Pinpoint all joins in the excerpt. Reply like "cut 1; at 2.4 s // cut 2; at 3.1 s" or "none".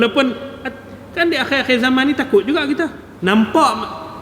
cut 1; at 3.1 s